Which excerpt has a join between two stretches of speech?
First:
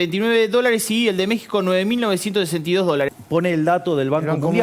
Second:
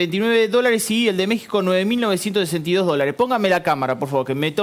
first; 1 cut; at 3.1 s

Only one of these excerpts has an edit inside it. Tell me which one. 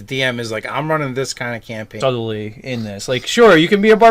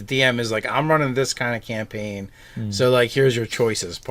second; 1 cut; at 1.9 s

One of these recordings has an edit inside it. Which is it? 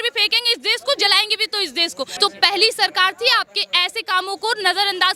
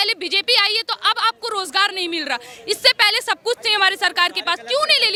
first; 1 cut; at 2.1 s

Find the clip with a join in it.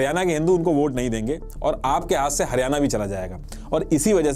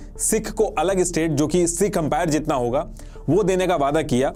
first; 1 cut; at 3.4 s

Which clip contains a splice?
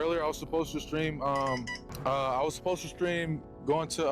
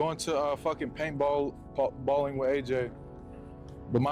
first; 1 cut; at 1.8 s

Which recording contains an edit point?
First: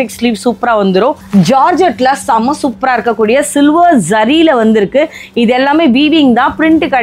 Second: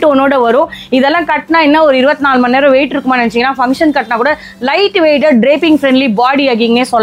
first; 1 cut; at 1.2 s

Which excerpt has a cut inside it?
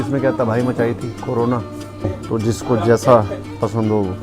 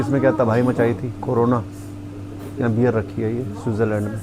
first; 1 cut; at 2.2 s

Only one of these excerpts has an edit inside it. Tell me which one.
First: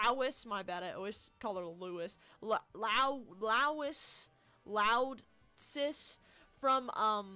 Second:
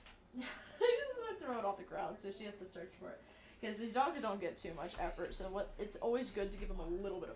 first; 1 cut; at 1.0 s

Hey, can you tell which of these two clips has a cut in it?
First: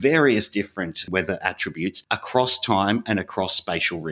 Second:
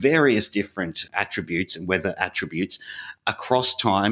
first; 2 cuts; at 1.0 s, 2.0 s

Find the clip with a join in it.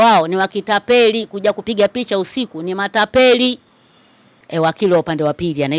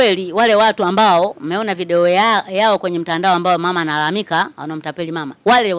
first; 1 cut; at 4.4 s

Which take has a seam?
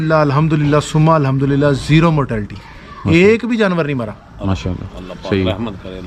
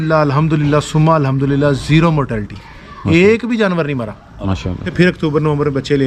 second; 1 cut; at 4.9 s

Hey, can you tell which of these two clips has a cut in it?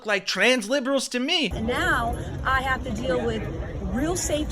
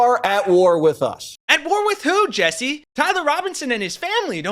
first; 1 cut; at 1.5 s

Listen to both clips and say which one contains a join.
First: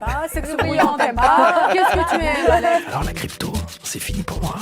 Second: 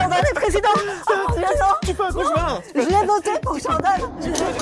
first; 1 cut; at 2.9 s

